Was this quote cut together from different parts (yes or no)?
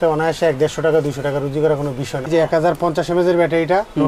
yes